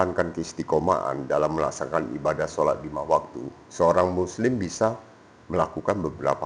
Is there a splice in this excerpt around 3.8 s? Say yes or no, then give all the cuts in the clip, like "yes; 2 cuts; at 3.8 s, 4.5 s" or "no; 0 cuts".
no; 0 cuts